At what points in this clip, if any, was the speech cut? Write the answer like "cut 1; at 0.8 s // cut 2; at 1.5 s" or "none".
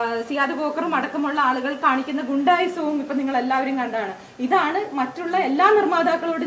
none